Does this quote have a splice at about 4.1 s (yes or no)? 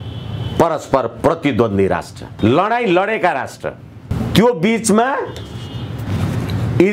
yes